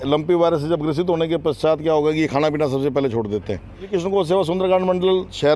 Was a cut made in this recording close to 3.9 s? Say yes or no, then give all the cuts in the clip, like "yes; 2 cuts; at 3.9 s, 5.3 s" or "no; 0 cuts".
yes; 1 cut; at 3.9 s